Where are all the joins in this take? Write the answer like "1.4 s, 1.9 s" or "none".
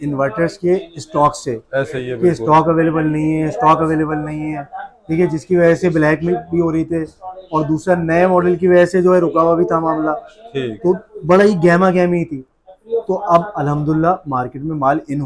none

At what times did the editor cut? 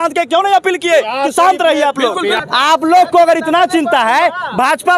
2.4 s

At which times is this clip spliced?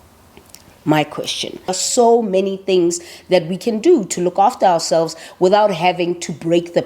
1.8 s

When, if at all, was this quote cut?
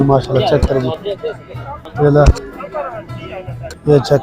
none

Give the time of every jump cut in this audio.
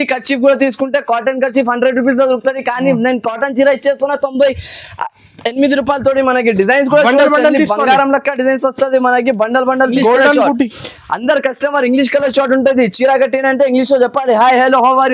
9.9 s

